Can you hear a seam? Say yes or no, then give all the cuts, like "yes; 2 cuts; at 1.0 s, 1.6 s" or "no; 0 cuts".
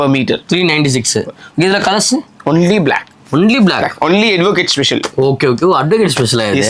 no; 0 cuts